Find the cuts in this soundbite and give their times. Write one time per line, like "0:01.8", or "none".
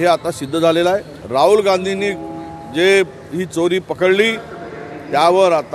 0:01.2